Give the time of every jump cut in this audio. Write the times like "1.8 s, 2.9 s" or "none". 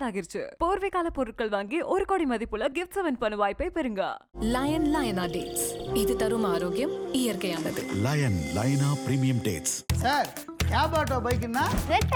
none